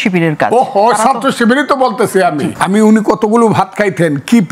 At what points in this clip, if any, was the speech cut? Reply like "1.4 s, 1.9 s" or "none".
2.5 s